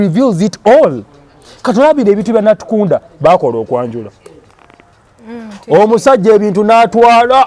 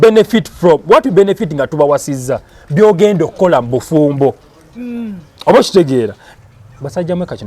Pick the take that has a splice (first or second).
second